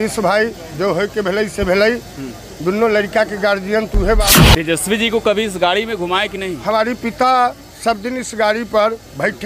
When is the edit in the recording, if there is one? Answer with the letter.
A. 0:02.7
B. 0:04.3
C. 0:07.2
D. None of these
B